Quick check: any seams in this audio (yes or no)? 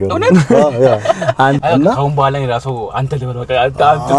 yes